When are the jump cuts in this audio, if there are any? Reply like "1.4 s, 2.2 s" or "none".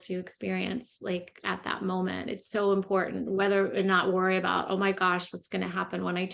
none